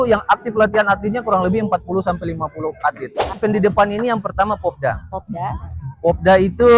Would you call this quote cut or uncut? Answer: cut